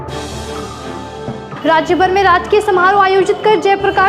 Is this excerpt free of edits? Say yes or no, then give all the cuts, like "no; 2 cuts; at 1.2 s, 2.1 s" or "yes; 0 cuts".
no; 1 cut; at 1.4 s